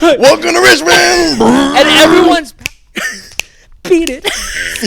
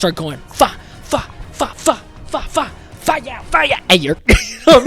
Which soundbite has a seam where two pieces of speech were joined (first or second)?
first